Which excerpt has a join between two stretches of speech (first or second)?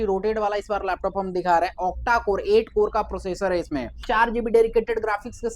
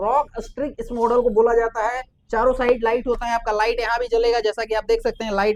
first